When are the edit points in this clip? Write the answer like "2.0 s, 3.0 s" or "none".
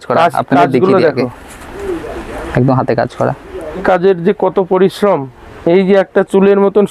3.8 s